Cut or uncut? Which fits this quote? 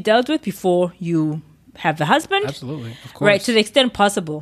uncut